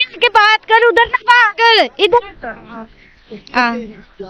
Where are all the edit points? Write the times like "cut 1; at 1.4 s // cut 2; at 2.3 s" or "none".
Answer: cut 1; at 2.3 s